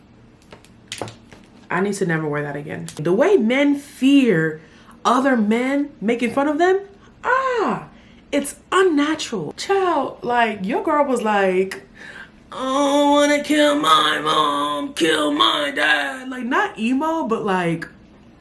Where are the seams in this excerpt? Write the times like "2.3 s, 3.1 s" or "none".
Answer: 3.0 s, 9.5 s